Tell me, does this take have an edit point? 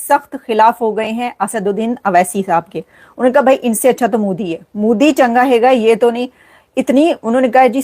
no; 0 cuts

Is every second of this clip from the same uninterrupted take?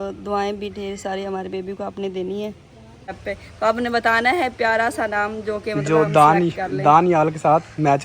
no; 1 cut; at 3.2 s

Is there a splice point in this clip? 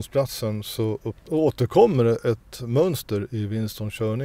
yes; 1 cut; at 1.1 s

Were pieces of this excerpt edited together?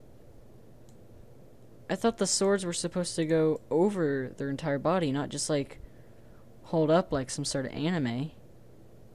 no; 0 cuts

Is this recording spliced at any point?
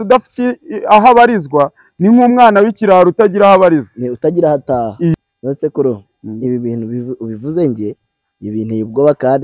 yes; 1 cut; at 5.1 s

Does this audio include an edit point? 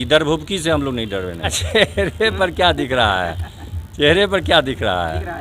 yes; 1 cut; at 1.6 s

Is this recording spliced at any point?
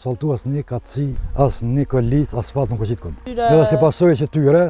yes; 2 cuts; at 1.2 s, 3.2 s

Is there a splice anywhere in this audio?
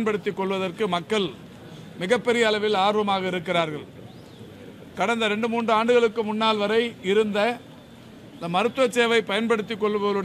no; 0 cuts

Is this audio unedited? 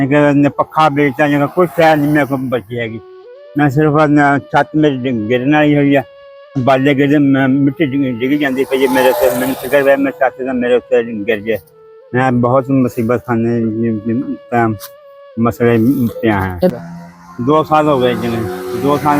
no; 1 cut; at 16.7 s

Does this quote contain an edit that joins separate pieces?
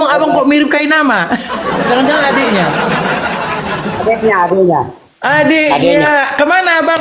no; 0 cuts

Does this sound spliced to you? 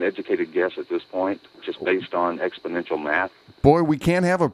yes; 1 cut; at 1.5 s

